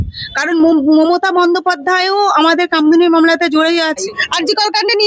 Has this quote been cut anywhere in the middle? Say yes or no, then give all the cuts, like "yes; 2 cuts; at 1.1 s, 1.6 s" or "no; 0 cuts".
yes; 1 cut; at 4.0 s